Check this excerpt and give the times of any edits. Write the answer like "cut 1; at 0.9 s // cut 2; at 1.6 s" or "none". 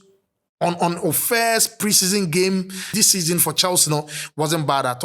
cut 1; at 2.9 s